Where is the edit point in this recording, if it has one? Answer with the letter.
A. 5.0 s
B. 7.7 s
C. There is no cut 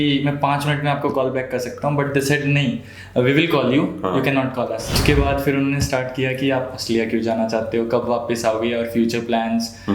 A